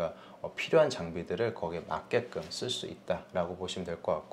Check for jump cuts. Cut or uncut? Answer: uncut